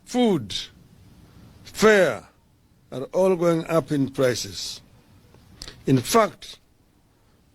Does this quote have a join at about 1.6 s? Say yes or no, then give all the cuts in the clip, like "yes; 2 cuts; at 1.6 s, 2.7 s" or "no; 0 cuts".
no; 1 cut; at 4.0 s